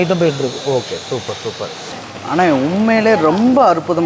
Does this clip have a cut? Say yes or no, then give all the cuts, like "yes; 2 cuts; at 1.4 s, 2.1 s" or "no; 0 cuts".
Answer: yes; 1 cut; at 2.0 s